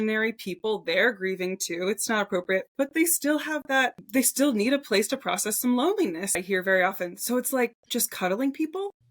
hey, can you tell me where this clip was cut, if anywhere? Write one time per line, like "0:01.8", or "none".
0:06.4

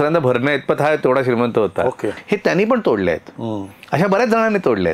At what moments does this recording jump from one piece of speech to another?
0:02.1

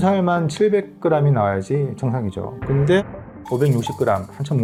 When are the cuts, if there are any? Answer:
none

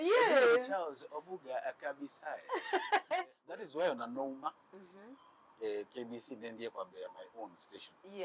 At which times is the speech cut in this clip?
0:03.4

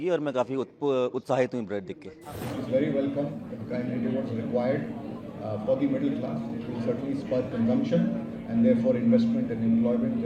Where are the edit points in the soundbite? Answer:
0:02.3

